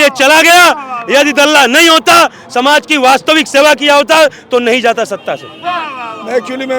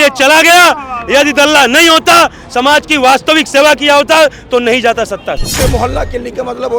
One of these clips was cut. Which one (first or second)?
second